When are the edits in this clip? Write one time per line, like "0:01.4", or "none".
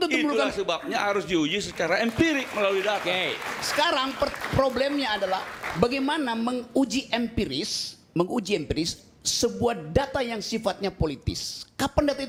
none